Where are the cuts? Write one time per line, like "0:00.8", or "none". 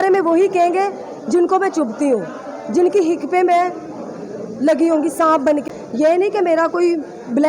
0:05.5